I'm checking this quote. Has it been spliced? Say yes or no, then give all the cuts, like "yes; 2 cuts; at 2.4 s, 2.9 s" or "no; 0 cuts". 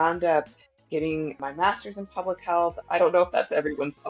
yes; 2 cuts; at 1.4 s, 2.8 s